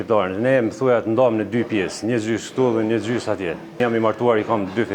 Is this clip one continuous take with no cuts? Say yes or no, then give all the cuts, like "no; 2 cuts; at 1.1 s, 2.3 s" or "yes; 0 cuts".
no; 1 cut; at 3.8 s